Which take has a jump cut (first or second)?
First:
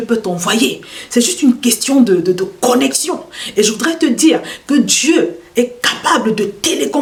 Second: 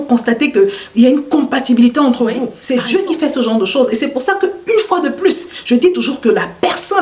second